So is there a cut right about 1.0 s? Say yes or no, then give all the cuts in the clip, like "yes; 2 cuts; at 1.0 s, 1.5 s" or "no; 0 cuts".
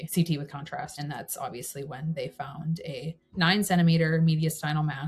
yes; 1 cut; at 1.0 s